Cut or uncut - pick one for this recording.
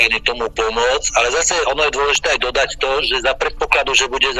uncut